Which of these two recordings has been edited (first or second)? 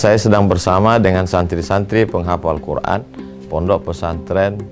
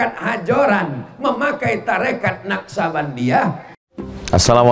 second